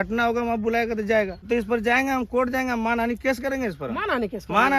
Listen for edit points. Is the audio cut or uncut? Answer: cut